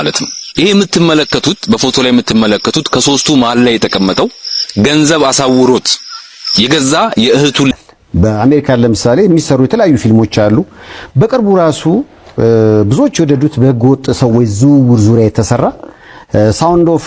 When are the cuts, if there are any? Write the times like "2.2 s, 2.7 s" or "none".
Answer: 7.7 s